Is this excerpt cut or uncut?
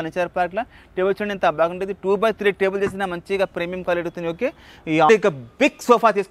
cut